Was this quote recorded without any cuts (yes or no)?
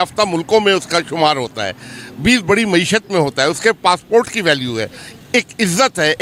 yes